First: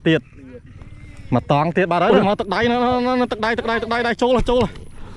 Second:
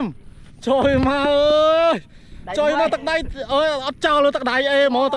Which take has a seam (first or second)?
first